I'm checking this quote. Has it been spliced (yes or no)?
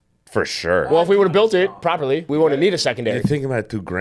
yes